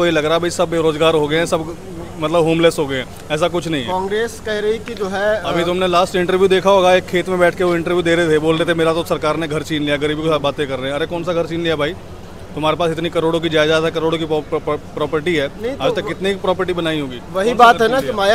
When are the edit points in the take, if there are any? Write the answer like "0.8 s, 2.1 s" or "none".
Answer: none